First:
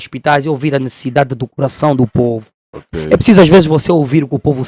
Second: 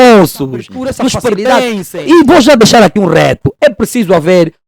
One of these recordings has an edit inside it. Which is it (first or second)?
second